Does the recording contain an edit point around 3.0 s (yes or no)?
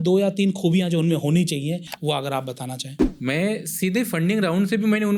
yes